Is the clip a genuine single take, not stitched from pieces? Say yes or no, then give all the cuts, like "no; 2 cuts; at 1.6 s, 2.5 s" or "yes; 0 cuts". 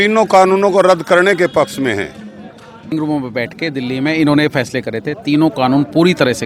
no; 1 cut; at 2.9 s